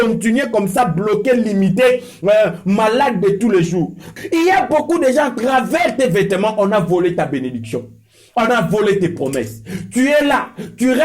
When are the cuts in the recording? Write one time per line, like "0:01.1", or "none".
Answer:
0:04.0